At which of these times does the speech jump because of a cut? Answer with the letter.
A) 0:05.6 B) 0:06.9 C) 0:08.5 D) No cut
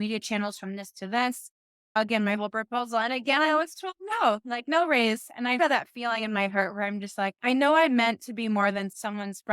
A